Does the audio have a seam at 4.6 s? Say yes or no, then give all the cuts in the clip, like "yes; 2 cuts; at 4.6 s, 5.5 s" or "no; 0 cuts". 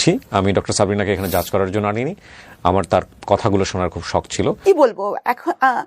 yes; 1 cut; at 4.6 s